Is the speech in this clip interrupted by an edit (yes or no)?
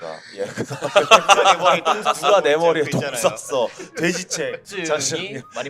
yes